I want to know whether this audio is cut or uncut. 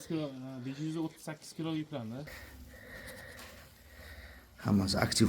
cut